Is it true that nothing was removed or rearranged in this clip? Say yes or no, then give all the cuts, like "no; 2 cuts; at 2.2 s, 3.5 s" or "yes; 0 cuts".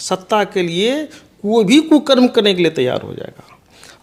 yes; 0 cuts